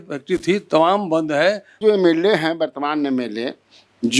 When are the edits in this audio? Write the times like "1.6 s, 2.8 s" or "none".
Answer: 1.7 s